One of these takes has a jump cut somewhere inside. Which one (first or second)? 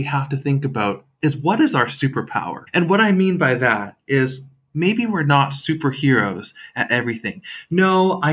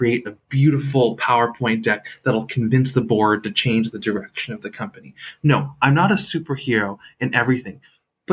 first